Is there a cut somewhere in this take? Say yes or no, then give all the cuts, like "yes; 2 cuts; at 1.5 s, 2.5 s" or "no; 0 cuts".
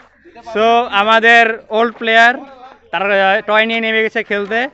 no; 0 cuts